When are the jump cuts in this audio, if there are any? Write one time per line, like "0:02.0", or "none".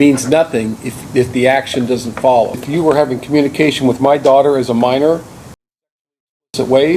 0:02.6